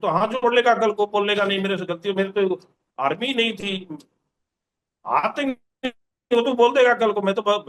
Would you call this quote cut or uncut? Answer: uncut